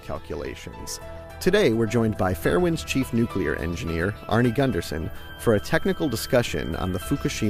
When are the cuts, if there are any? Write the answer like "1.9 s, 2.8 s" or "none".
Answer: 2.4 s